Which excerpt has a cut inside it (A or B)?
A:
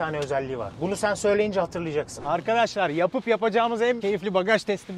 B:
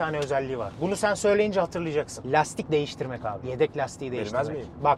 A